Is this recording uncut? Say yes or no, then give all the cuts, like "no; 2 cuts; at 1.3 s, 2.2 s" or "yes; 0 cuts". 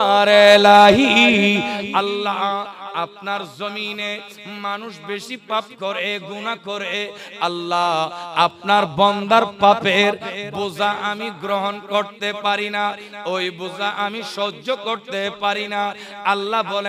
yes; 0 cuts